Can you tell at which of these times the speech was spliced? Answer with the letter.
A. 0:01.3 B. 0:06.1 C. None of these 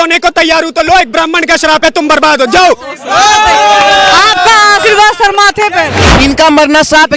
B